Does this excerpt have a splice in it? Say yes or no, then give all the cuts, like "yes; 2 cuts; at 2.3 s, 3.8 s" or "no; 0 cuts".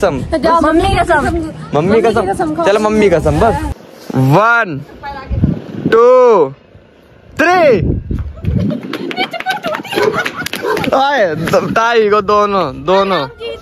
yes; 1 cut; at 3.8 s